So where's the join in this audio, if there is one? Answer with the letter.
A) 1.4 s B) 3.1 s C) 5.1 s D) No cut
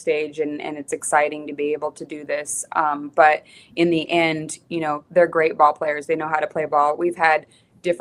D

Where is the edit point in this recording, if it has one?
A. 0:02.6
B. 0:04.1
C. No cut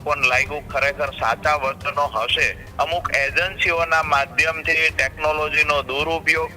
A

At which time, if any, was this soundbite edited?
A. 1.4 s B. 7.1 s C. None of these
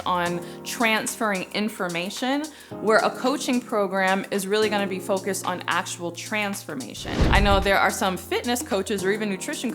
B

